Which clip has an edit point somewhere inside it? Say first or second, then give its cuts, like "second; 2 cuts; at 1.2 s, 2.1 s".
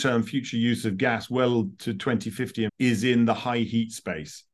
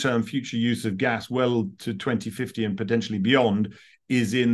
first; 1 cut; at 2.7 s